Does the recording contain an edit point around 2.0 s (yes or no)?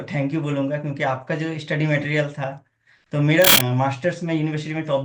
no